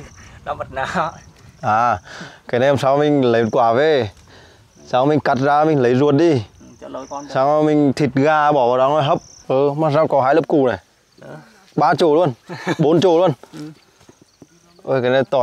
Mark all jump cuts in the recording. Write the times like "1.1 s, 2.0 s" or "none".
9.3 s